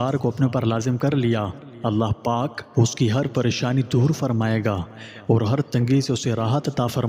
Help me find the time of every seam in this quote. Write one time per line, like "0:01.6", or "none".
0:02.6